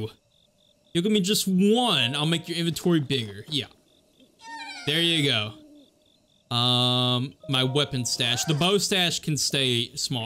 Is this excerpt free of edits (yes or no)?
yes